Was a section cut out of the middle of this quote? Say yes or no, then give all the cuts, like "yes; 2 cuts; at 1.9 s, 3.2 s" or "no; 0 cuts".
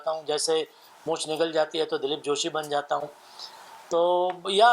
no; 0 cuts